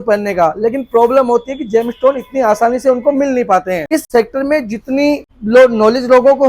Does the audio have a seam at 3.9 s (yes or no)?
yes